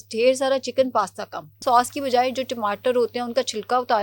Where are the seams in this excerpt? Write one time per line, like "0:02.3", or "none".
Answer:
0:01.6